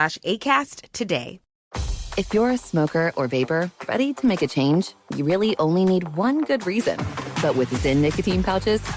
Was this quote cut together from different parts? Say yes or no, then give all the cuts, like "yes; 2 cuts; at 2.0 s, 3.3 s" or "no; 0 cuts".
yes; 1 cut; at 1.6 s